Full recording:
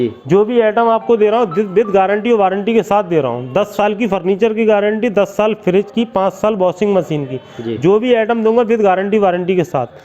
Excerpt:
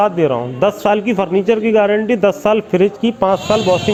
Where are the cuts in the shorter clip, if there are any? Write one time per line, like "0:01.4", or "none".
none